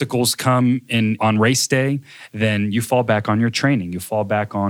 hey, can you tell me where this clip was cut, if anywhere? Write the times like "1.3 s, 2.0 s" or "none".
1.2 s